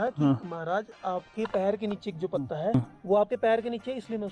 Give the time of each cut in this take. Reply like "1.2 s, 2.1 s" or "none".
2.7 s